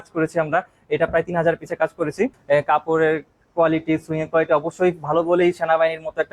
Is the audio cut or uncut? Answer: cut